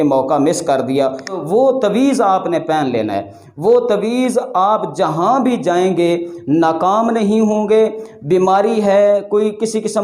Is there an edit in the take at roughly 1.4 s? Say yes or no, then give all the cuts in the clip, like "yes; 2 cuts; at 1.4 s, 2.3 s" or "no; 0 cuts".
yes; 1 cut; at 1.4 s